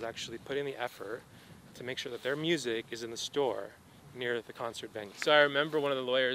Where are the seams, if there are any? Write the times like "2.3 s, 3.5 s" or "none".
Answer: 5.1 s